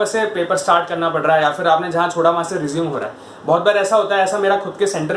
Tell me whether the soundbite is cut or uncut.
uncut